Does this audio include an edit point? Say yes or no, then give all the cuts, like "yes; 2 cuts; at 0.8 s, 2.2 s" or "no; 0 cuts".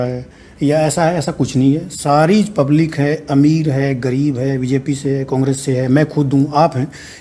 no; 0 cuts